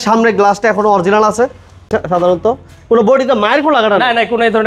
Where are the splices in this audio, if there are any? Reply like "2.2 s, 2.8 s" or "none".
1.9 s